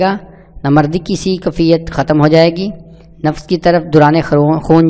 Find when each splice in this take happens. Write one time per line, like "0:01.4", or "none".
none

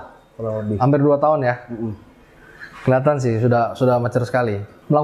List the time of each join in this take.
none

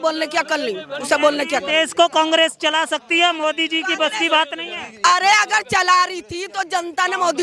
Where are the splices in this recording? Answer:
none

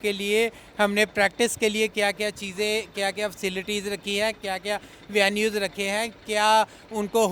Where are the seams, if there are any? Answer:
none

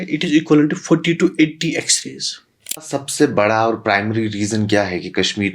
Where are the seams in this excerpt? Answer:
0:02.9

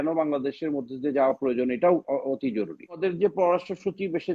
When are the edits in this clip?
0:03.0

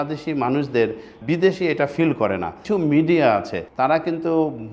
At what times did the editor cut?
0:02.5

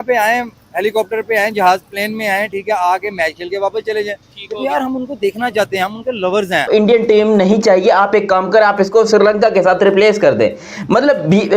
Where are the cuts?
0:06.7

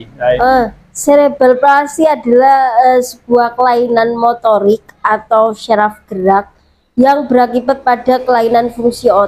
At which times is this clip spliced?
none

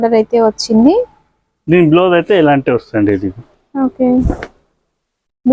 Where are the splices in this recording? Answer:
none

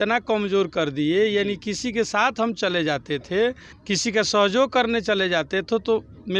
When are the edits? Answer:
0:03.7

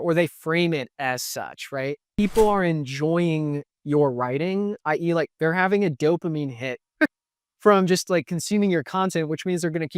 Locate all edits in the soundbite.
0:02.1

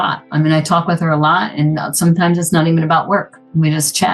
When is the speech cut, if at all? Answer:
none

